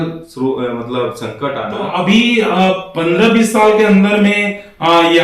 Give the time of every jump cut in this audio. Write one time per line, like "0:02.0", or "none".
0:01.8